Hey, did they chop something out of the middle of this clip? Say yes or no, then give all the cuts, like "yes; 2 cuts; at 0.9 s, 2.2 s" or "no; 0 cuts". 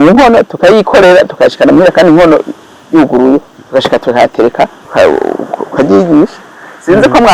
yes; 1 cut; at 4.8 s